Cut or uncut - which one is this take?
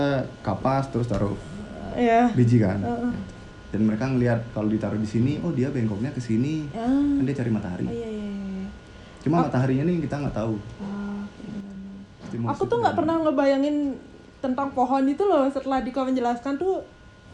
uncut